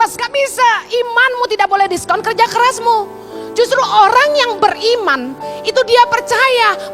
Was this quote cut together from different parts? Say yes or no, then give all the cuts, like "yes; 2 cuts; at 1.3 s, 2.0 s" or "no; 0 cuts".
no; 0 cuts